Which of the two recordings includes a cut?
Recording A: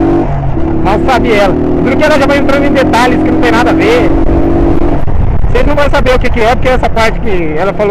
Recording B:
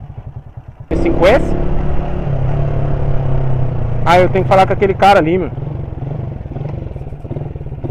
B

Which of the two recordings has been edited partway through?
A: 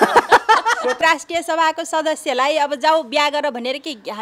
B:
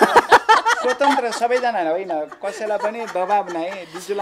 A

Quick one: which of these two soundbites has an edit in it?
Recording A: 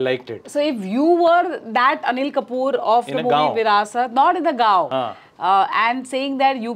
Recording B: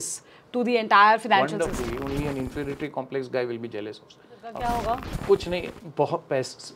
B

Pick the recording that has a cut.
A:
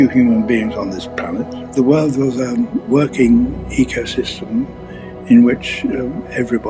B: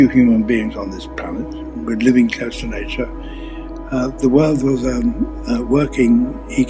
A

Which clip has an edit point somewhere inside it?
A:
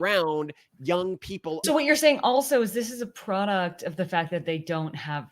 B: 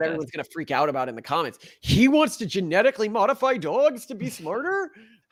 A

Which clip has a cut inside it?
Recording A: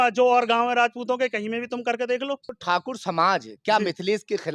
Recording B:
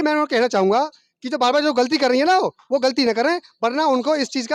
A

